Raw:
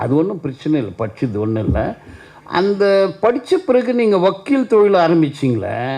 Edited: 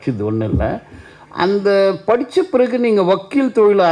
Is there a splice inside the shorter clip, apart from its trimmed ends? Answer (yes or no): no